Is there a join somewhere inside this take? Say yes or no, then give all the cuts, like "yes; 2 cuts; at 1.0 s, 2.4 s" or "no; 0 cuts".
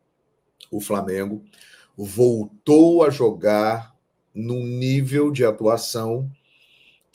no; 0 cuts